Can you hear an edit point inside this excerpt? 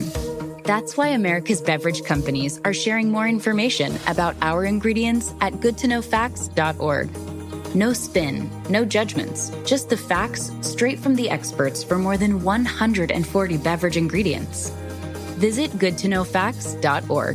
no; 0 cuts

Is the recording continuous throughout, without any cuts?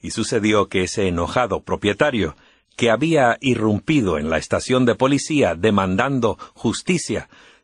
yes; 0 cuts

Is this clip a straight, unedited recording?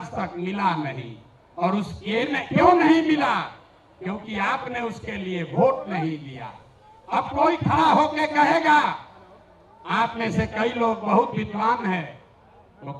yes; 0 cuts

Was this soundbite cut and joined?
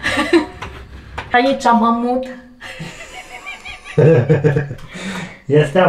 yes; 1 cut; at 1.3 s

